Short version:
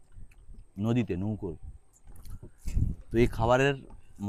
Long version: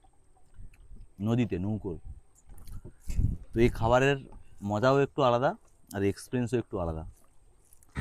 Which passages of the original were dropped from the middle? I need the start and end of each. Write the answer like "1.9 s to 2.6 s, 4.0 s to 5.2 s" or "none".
none